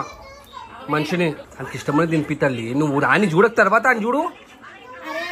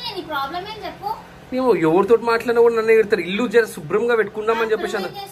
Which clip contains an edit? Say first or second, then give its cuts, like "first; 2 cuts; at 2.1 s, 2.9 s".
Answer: first; 1 cut; at 1.5 s